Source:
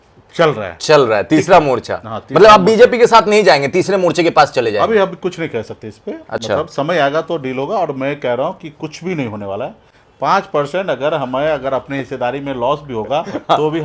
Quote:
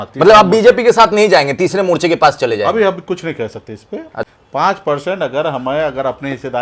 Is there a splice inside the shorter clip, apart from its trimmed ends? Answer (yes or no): yes